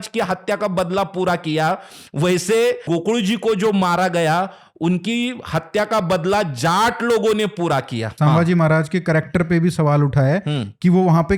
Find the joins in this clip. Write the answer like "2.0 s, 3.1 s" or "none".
2.8 s, 8.1 s